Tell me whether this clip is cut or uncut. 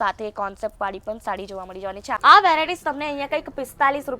cut